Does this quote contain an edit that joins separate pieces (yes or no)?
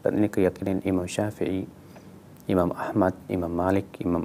no